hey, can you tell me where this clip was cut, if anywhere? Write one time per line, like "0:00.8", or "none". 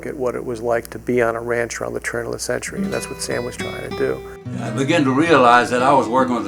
0:04.6